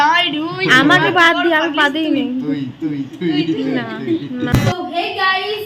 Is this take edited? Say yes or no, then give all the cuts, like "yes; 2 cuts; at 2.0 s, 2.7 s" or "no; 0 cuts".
yes; 1 cut; at 4.6 s